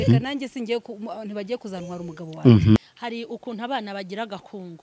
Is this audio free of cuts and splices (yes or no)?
no